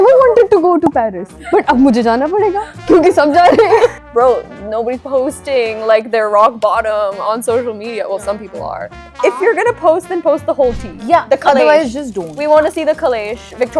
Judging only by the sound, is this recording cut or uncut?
cut